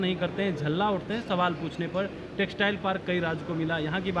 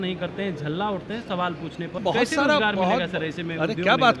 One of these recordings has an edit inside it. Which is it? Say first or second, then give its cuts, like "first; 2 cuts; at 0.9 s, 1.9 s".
second; 1 cut; at 2.0 s